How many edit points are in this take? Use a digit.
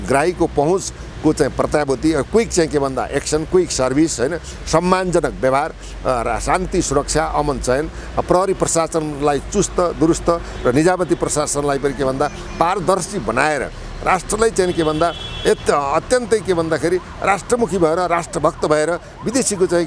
0